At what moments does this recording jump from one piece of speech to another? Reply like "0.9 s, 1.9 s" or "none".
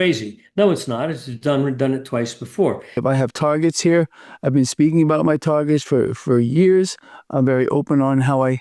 3.0 s